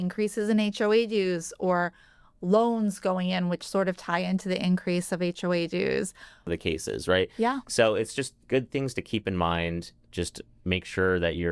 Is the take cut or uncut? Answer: cut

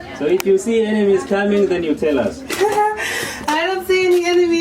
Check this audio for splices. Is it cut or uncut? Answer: uncut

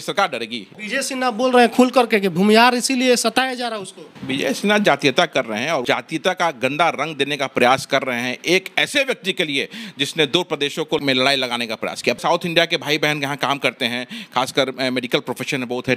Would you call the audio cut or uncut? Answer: cut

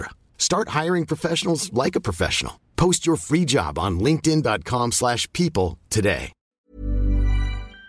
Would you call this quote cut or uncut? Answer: cut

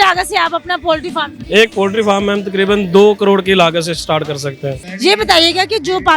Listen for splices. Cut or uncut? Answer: cut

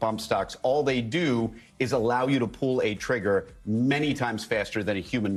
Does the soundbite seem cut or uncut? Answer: uncut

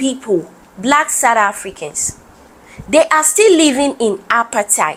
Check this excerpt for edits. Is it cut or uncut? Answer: uncut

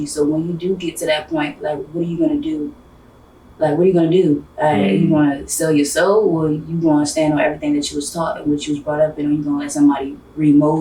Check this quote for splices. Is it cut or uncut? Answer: uncut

